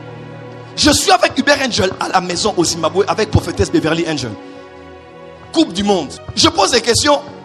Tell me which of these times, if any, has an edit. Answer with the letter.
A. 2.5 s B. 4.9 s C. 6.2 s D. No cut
C